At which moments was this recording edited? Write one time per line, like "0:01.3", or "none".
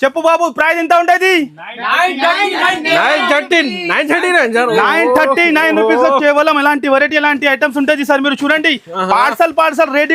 none